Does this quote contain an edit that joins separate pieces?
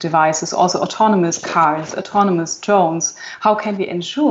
no; 0 cuts

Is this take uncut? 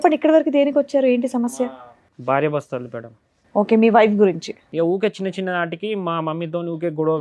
no; 1 cut; at 4.6 s

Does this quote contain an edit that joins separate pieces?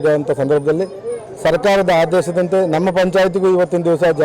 no; 0 cuts

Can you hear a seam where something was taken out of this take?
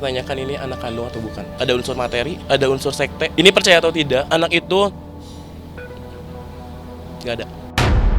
yes; 4 cuts; at 1.4 s, 2.4 s, 3.3 s, 4.3 s

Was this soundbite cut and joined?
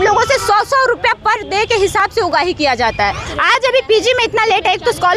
yes; 1 cut; at 3.3 s

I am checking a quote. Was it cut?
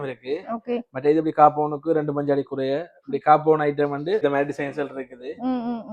yes; 1 cut; at 4.2 s

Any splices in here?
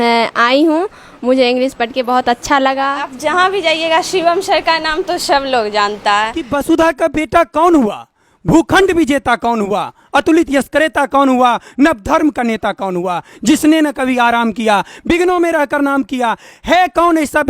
yes; 2 cuts; at 3.1 s, 6.4 s

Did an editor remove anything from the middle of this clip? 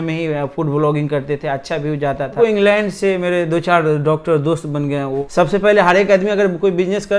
yes; 2 cuts; at 2.3 s, 5.2 s

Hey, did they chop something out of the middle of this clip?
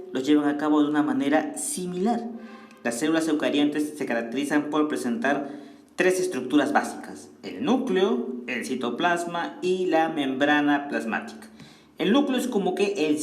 yes; 1 cut; at 9.9 s

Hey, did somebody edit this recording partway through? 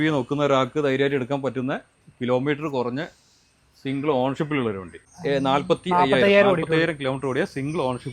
yes; 1 cut; at 5.1 s

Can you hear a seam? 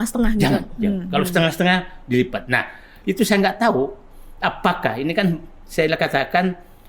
no; 0 cuts

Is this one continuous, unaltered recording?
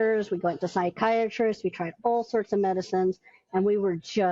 yes; 0 cuts

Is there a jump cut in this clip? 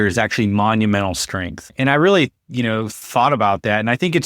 yes; 1 cut; at 1.7 s

